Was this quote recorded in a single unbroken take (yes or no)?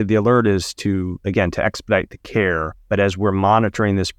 no